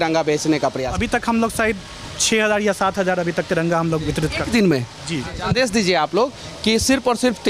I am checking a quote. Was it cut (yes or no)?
yes